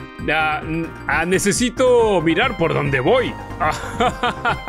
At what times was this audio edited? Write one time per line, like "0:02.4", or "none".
0:01.0
0:03.4